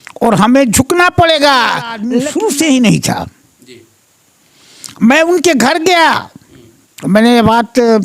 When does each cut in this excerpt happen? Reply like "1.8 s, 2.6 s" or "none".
2.1 s